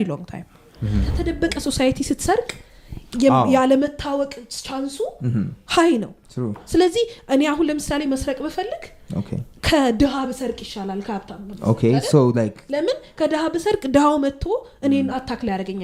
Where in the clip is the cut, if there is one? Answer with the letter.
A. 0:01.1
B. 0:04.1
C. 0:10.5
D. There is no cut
A